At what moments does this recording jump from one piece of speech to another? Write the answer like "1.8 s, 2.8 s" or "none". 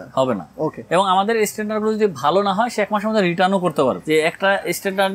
4.0 s